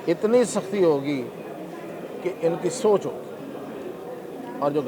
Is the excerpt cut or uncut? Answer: uncut